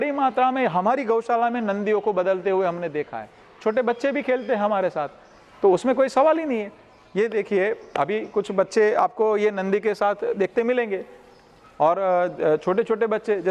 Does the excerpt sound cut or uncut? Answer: uncut